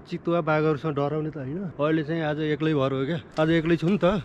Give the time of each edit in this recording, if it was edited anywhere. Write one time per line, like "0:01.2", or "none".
0:01.7
0:03.2